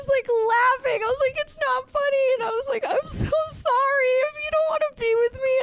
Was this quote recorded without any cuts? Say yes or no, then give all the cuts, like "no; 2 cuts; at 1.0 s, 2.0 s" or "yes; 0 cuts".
yes; 0 cuts